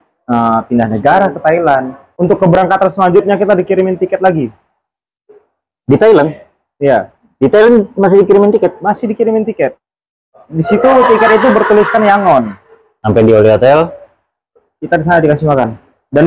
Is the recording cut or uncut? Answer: cut